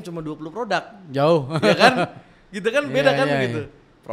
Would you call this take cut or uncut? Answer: uncut